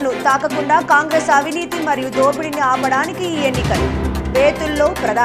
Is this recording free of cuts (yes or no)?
yes